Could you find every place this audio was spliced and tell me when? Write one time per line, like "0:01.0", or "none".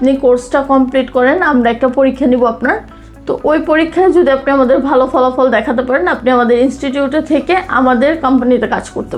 none